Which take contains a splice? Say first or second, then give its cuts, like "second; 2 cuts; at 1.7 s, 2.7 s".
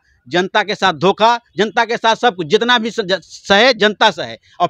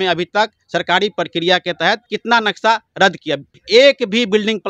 second; 2 cuts; at 2.1 s, 3.5 s